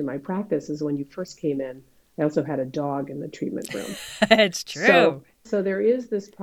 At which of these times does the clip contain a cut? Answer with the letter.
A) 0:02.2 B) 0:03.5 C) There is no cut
C